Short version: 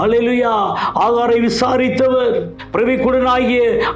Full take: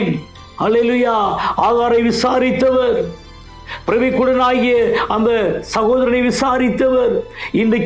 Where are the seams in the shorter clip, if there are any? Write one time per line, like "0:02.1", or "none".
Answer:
0:02.6